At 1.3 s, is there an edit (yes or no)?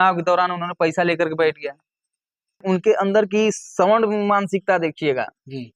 no